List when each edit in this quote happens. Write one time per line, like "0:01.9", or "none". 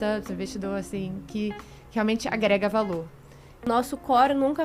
0:03.5

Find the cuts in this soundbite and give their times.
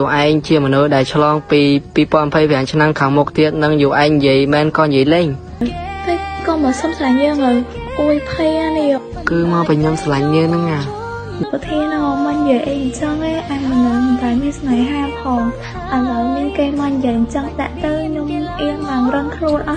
0:05.6
0:11.4

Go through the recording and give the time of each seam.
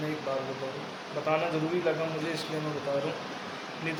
none

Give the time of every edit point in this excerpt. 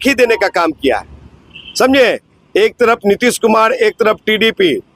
none

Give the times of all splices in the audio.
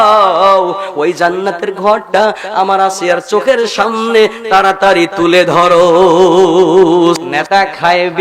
0:07.2

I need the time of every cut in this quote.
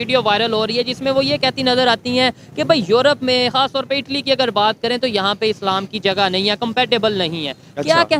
none

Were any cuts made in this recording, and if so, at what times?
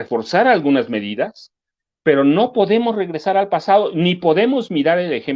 none

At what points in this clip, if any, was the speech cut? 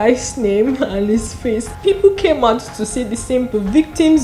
0:01.7
0:03.5

